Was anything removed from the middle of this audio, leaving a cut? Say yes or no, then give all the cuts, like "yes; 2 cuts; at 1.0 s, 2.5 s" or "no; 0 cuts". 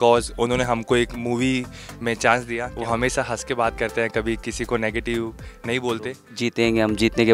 yes; 2 cuts; at 2.6 s, 6.2 s